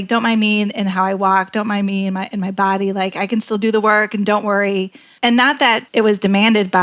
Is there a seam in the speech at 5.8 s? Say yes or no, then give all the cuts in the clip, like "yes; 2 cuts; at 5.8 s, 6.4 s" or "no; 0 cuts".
yes; 1 cut; at 5.8 s